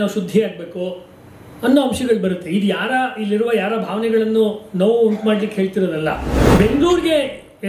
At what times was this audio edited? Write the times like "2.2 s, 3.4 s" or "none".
6.3 s